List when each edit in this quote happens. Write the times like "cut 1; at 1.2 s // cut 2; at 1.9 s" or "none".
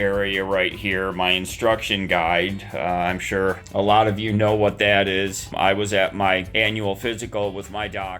cut 1; at 3.6 s // cut 2; at 5.5 s // cut 3; at 6.5 s